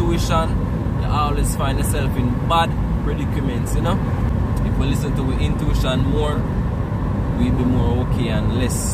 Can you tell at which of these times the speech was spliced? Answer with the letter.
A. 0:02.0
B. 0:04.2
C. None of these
B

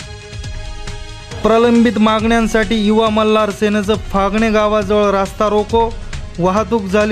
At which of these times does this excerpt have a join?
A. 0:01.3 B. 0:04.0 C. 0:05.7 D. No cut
A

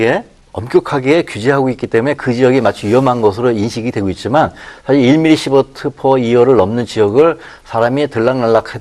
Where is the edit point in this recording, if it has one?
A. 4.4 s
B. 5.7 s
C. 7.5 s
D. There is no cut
D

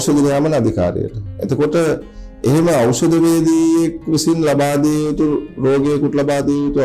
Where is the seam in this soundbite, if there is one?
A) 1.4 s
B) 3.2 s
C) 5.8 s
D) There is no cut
D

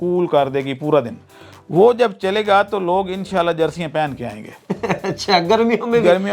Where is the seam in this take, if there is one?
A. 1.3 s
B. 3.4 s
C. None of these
A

